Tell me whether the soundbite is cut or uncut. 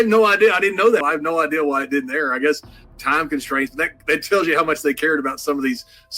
cut